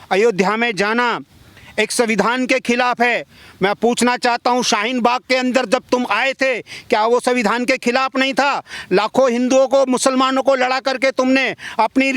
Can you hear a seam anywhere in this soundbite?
no; 0 cuts

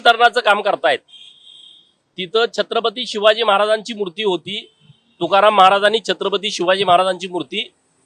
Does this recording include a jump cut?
no; 0 cuts

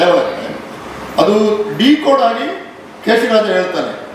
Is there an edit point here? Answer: no; 0 cuts

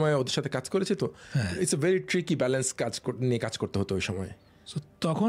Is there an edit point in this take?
no; 0 cuts

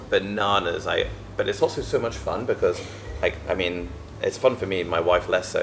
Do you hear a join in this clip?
no; 0 cuts

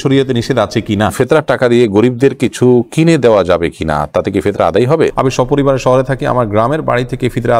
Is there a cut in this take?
yes; 2 cuts; at 1.1 s, 5.1 s

